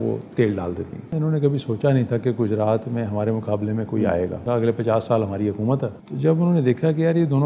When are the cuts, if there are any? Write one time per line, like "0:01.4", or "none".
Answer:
0:01.1
0:04.4
0:05.9